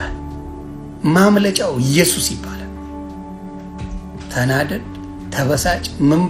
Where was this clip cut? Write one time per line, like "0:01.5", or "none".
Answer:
none